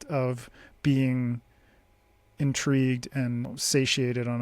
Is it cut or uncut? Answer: cut